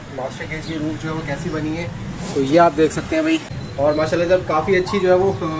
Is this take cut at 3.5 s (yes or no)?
yes